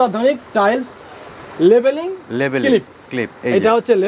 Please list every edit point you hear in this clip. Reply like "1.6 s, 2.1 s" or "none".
none